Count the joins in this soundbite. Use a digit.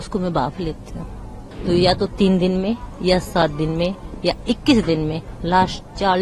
1